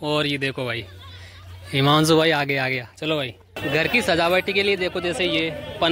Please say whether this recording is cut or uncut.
cut